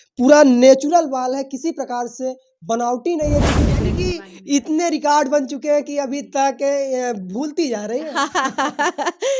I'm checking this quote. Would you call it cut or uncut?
cut